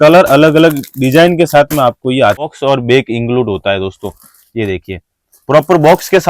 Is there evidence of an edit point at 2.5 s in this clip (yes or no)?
yes